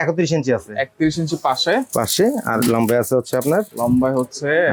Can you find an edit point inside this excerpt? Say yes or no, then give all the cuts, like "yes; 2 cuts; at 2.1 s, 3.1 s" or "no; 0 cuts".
no; 0 cuts